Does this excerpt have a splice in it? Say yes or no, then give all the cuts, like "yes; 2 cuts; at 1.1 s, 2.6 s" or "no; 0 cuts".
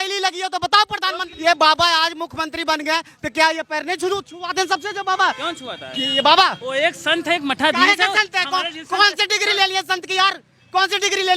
yes; 1 cut; at 1.3 s